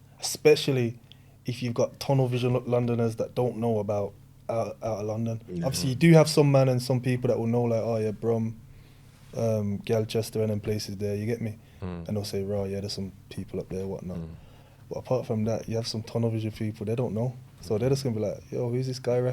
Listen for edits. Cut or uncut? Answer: uncut